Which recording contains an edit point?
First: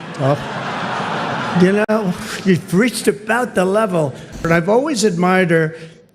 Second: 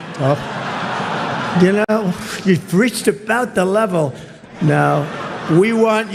first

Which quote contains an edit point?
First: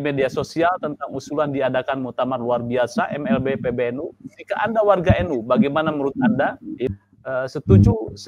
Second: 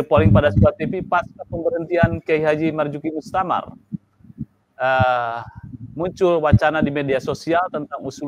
first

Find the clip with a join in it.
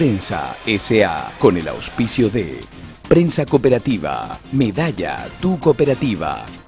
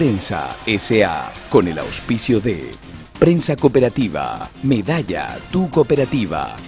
first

